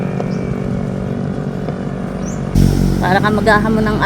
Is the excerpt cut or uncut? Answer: cut